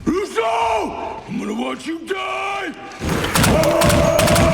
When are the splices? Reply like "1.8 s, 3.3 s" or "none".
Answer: 1.2 s, 3.4 s